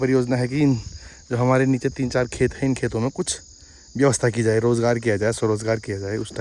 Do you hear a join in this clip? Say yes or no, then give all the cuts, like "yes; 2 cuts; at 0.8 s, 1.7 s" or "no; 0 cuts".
no; 0 cuts